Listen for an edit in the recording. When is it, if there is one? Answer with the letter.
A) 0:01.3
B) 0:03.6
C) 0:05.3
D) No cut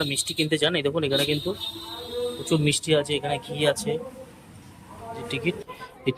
C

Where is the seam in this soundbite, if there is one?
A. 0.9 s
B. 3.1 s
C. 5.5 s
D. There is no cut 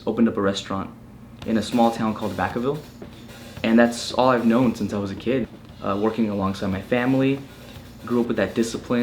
C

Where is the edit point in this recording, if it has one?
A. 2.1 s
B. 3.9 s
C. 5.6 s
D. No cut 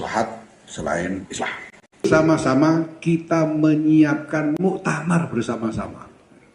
A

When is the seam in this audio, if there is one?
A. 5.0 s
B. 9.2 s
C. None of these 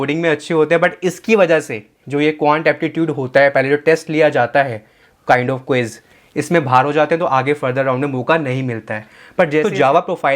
B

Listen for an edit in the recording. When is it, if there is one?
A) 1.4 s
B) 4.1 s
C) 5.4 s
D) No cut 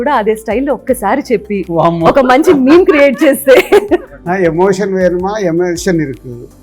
D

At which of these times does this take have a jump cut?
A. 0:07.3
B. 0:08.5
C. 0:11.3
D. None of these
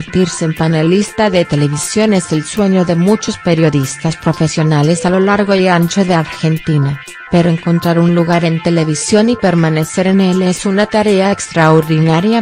D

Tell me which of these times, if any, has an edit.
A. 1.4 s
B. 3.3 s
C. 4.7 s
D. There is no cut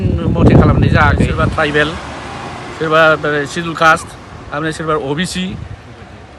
A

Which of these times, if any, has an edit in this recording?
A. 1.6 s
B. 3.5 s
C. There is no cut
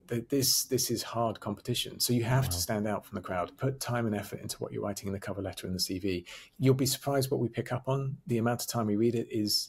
B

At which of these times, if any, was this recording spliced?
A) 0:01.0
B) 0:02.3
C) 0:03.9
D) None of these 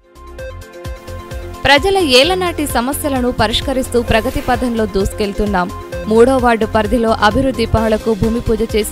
A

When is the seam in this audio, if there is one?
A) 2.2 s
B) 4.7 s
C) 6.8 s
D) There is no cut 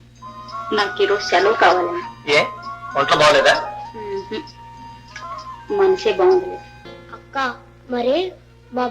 C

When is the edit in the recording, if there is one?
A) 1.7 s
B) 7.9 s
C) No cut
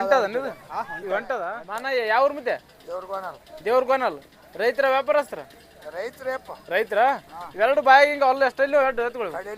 A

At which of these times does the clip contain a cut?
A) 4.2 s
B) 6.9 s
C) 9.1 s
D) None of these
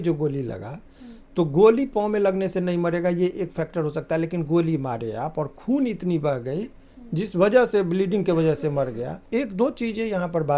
C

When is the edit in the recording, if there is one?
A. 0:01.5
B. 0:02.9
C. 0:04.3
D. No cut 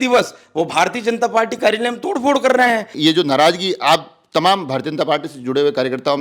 B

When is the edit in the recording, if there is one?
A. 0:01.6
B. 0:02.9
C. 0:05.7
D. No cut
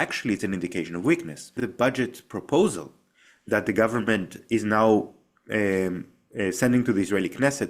A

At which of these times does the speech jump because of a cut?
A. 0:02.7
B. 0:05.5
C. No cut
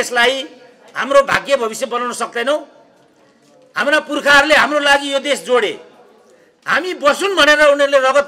C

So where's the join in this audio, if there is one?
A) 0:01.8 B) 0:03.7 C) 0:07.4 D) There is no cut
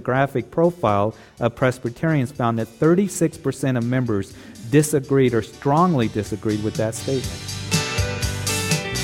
C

